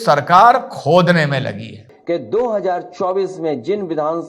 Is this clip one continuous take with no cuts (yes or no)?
no